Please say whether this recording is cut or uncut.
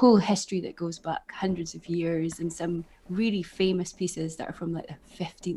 uncut